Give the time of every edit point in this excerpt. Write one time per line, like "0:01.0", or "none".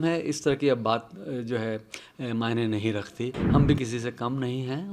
0:03.4